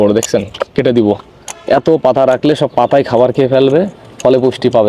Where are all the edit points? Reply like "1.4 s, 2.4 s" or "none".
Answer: none